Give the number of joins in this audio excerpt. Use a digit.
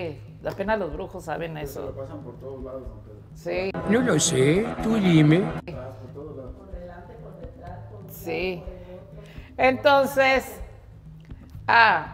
0